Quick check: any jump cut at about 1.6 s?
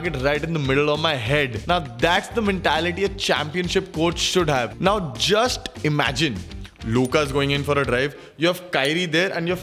yes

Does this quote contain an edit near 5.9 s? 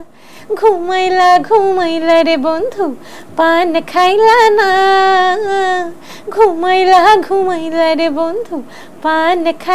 no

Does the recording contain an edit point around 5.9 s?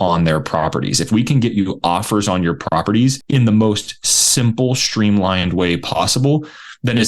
no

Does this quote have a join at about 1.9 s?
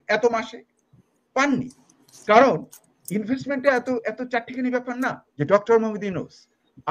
no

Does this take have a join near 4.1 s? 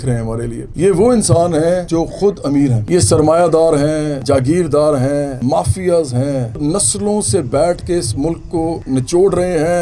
yes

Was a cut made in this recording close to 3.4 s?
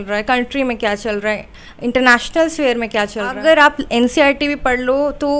yes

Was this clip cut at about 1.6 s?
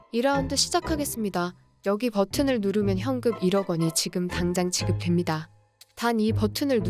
yes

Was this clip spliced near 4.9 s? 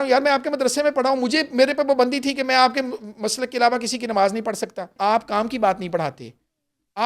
yes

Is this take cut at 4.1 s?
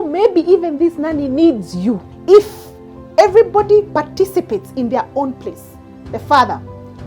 no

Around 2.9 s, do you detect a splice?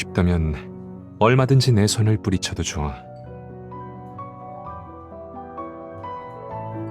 yes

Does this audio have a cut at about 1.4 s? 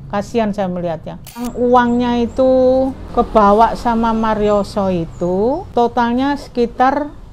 yes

